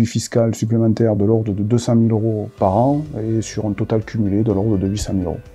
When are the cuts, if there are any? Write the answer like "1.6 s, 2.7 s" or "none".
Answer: none